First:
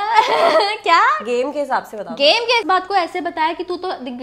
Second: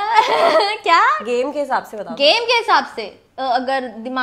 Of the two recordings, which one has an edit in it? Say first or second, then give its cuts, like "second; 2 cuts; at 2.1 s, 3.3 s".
first; 1 cut; at 2.6 s